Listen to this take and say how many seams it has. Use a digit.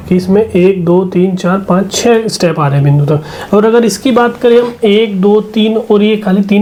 0